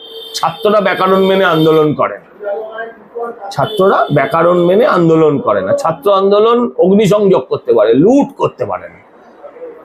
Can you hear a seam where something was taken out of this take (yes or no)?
no